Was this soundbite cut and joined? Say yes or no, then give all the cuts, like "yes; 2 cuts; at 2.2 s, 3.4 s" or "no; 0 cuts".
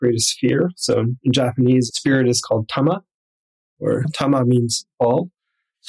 no; 0 cuts